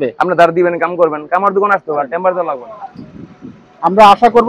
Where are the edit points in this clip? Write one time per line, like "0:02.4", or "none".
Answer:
0:02.6